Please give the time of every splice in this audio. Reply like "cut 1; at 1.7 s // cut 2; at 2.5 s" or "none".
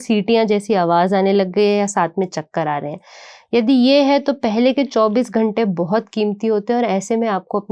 none